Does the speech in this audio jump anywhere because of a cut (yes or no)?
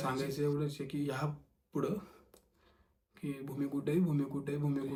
no